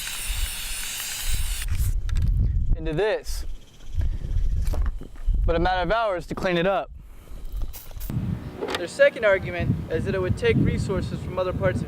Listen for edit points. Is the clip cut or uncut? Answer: cut